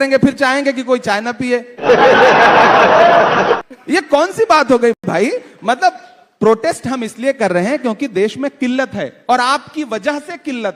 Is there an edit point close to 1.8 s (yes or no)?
no